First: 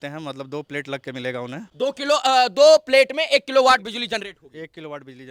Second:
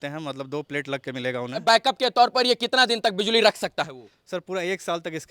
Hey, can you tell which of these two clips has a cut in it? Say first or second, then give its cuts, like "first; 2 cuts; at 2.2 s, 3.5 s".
second; 1 cut; at 1.6 s